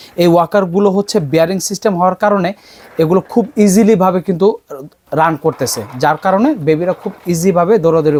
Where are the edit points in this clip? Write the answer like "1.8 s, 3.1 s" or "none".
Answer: none